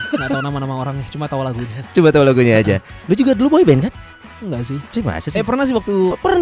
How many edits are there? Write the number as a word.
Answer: zero